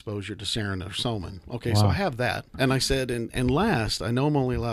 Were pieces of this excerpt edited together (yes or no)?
yes